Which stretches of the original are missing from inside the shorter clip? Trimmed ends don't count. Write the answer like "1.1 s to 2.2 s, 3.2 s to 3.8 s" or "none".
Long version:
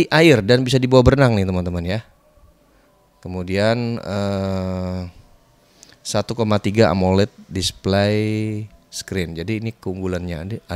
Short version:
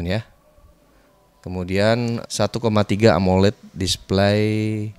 4.0 s to 6.0 s